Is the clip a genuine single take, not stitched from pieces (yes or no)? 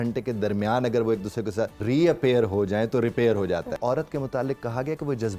no